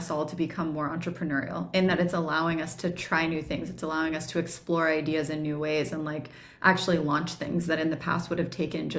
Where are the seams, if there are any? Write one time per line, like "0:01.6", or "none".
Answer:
none

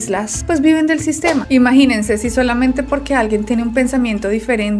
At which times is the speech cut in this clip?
0:01.4

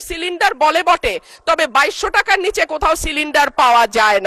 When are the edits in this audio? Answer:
none

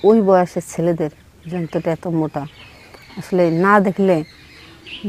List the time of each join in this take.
none

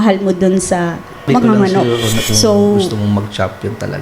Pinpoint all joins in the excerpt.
0:02.9

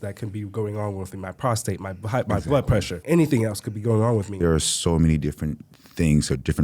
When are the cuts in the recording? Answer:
0:02.9
0:04.3

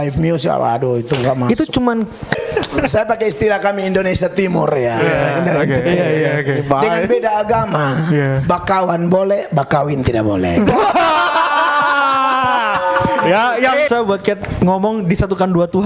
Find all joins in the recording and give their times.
0:02.3
0:13.9

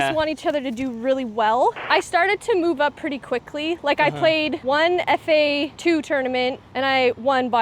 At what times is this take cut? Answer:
0:01.8
0:04.6
0:05.7
0:06.6

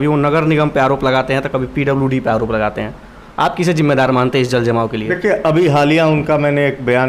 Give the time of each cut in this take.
none

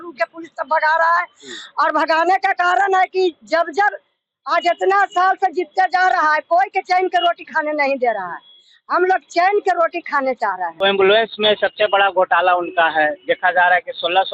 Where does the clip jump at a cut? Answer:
0:10.7

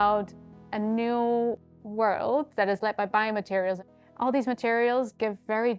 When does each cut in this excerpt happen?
0:03.8

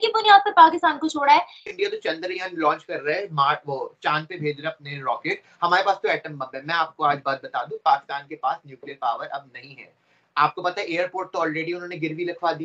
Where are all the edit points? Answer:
0:01.7

